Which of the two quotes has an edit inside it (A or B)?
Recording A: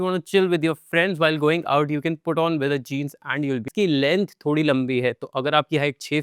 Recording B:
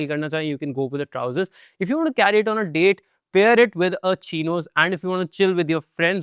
A